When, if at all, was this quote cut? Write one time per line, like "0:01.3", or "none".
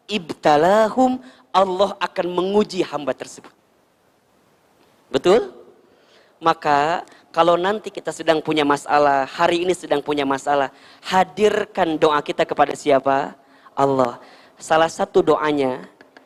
none